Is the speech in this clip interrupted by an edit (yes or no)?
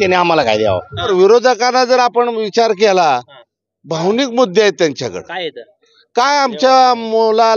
yes